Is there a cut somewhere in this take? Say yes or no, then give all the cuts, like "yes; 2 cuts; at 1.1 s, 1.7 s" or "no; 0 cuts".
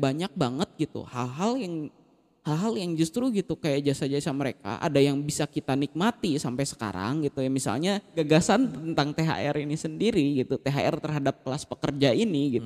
yes; 1 cut; at 8.2 s